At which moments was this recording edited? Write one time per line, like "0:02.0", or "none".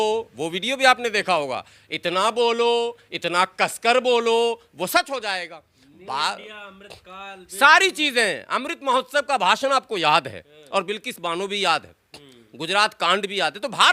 none